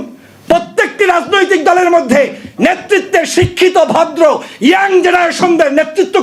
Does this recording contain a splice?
no; 0 cuts

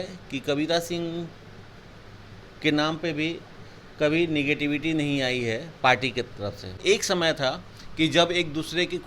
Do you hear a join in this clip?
yes; 1 cut; at 6.8 s

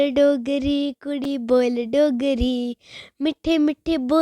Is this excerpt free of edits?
yes; 0 cuts

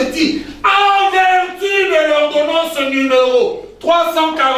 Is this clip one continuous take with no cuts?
yes; 0 cuts

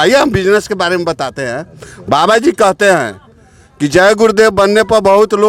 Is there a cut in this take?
no; 0 cuts

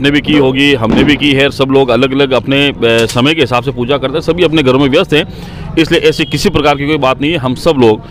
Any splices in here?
no; 0 cuts

